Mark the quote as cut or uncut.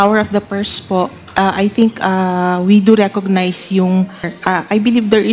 cut